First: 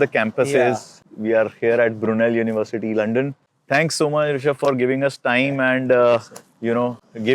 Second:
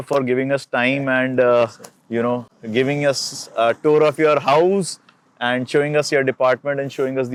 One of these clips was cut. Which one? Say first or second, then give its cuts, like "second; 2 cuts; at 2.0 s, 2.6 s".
first; 1 cut; at 1.1 s